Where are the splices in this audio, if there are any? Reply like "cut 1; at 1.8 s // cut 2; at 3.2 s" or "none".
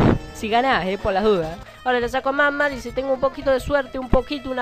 cut 1; at 1.7 s